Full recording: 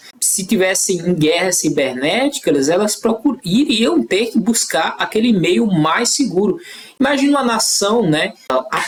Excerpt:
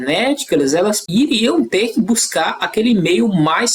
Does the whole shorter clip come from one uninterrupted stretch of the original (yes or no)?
no